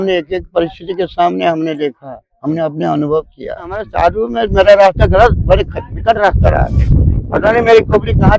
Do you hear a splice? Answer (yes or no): yes